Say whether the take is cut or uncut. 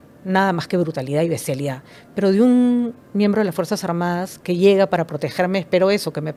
uncut